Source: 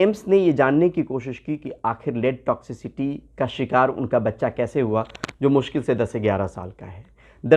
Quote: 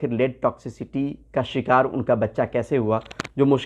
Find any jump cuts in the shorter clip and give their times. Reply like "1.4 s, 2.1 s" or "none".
none